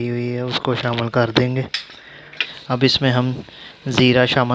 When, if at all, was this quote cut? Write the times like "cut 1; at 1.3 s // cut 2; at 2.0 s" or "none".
cut 1; at 2.5 s